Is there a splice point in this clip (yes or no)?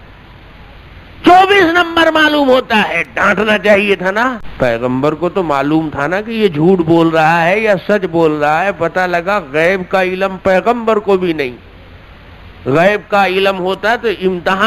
yes